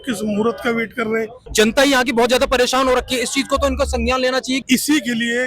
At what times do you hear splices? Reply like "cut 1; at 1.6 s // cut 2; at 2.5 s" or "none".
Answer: cut 1; at 1.5 s // cut 2; at 4.6 s